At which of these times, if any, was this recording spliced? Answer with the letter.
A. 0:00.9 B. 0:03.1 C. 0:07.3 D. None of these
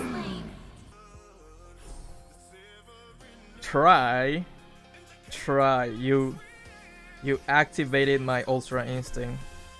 A